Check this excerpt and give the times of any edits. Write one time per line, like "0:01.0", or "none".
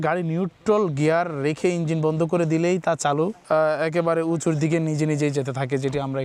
0:03.4